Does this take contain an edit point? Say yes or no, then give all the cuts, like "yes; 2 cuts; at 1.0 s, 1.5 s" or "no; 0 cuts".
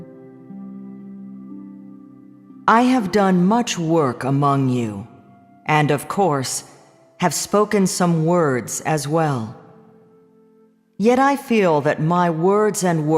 yes; 1 cut; at 12.2 s